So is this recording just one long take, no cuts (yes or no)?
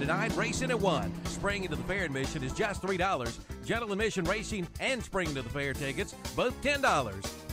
no